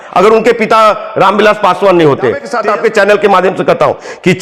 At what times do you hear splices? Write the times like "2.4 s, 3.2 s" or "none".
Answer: 2.5 s